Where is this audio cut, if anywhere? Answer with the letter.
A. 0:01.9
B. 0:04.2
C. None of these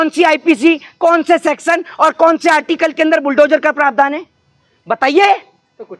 C